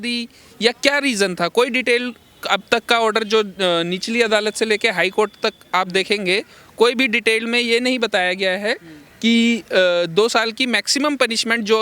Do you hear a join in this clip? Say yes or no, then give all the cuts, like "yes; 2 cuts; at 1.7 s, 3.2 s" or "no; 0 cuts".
no; 0 cuts